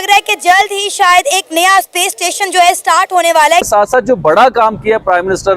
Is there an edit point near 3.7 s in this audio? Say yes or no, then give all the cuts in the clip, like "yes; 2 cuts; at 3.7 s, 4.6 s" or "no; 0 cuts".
yes; 1 cut; at 3.7 s